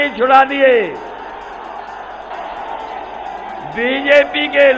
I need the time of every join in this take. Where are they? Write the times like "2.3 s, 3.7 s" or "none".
2.3 s